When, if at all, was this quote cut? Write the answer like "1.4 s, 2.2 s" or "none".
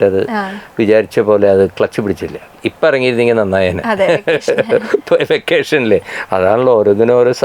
none